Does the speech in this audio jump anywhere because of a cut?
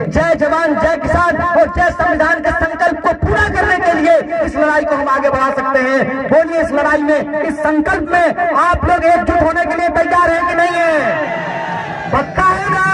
no; 0 cuts

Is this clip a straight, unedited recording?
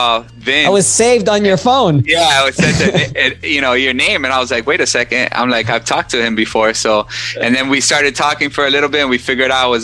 yes; 0 cuts

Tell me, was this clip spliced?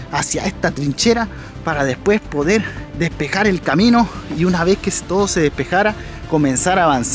no; 0 cuts

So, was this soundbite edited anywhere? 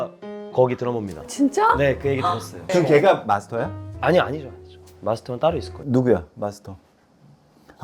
yes; 1 cut; at 2.6 s

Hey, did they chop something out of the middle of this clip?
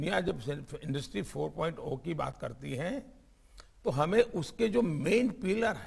no; 0 cuts

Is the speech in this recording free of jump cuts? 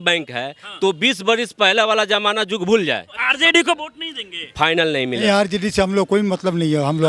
no; 2 cuts; at 3.2 s, 5.2 s

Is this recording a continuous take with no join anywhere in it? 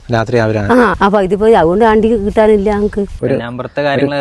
no; 2 cuts; at 0.9 s, 3.1 s

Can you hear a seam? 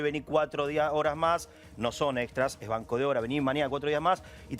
no; 0 cuts

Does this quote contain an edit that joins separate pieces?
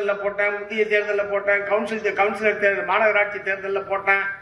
no; 0 cuts

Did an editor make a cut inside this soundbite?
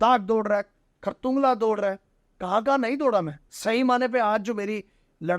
yes; 1 cut; at 3.4 s

